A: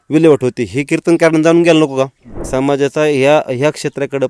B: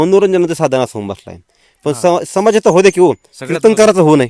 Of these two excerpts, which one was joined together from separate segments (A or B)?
A